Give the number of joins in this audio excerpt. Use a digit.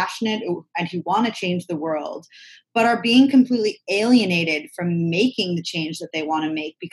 0